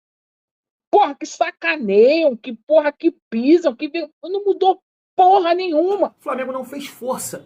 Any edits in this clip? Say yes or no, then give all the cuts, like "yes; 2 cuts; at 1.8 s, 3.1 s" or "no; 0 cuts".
yes; 1 cut; at 6.2 s